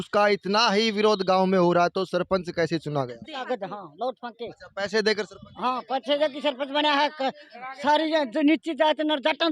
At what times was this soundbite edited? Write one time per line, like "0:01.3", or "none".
0:03.4

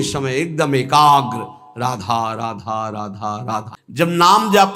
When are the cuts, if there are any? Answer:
0:03.7

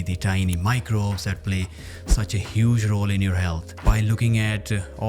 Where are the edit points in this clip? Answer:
none

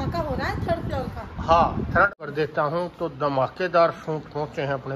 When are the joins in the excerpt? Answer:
0:02.2

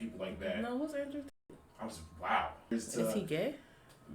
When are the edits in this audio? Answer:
0:02.7

